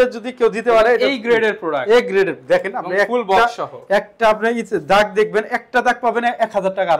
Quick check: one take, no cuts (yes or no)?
yes